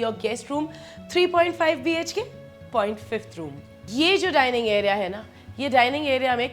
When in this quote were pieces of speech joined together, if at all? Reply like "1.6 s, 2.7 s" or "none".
3.7 s